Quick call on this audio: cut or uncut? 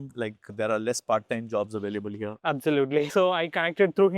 cut